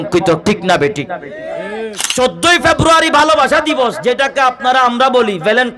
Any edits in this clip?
yes; 1 cut; at 2.0 s

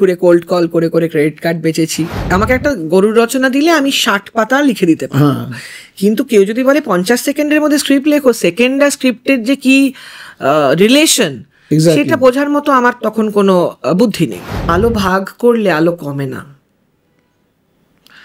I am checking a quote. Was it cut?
yes; 2 cuts; at 2.3 s, 14.6 s

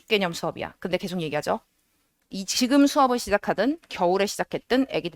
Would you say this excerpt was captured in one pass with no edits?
yes; 0 cuts

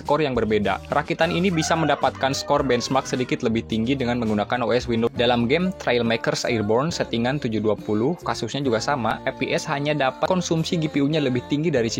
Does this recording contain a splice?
yes; 2 cuts; at 5.1 s, 10.3 s

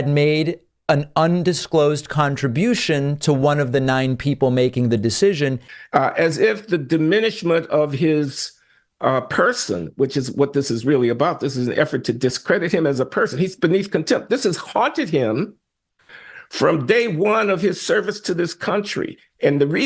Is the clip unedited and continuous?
no; 1 cut; at 5.6 s

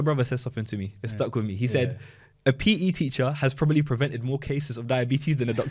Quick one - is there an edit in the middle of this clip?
no; 0 cuts

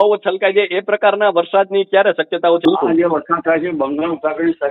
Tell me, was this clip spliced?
yes; 1 cut; at 2.6 s

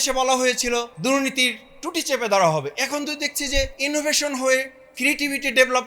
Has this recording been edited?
yes; 2 cuts; at 0.9 s, 3.8 s

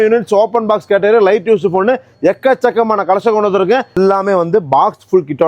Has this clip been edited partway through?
yes; 1 cut; at 4.0 s

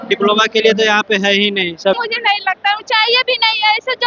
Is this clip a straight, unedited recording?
no; 1 cut; at 1.9 s

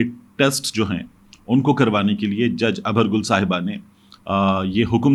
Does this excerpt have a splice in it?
no; 0 cuts

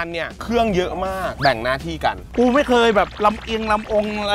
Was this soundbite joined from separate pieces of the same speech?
yes; 1 cut; at 1.3 s

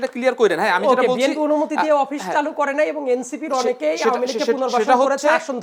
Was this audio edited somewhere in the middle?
no; 0 cuts

